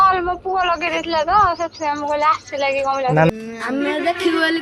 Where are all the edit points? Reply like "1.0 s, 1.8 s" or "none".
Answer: 3.3 s